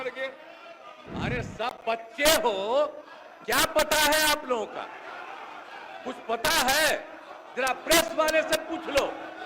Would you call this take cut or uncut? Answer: cut